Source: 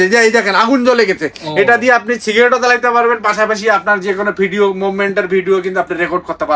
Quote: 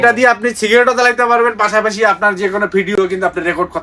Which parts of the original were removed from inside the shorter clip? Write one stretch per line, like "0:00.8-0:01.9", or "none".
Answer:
0:04.6-0:05.5